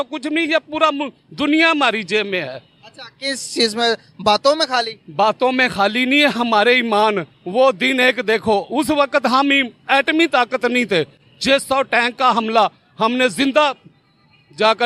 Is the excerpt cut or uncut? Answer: uncut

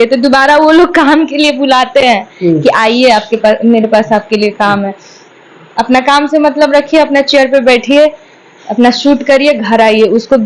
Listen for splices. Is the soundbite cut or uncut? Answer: uncut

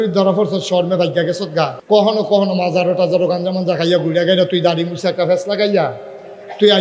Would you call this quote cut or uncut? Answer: cut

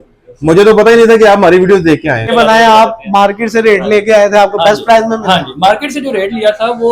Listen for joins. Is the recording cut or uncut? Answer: cut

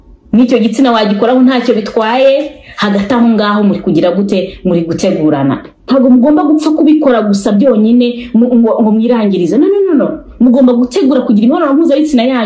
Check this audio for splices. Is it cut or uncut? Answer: cut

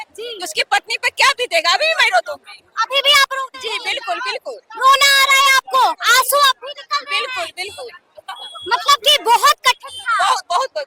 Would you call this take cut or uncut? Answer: uncut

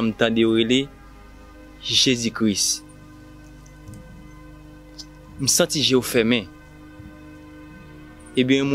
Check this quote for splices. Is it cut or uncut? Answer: uncut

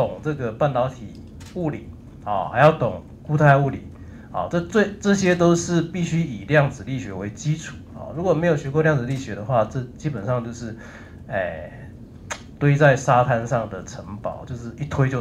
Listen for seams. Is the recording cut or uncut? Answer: uncut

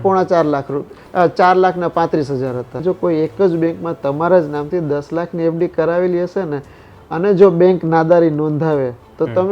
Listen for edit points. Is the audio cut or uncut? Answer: cut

